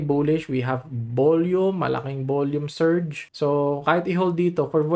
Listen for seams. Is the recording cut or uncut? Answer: uncut